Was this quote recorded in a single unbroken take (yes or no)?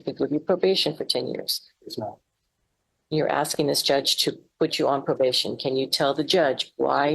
yes